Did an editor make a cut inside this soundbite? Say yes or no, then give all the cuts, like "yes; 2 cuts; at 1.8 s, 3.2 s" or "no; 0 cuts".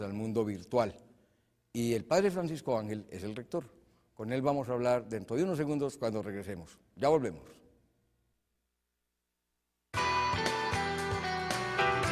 no; 0 cuts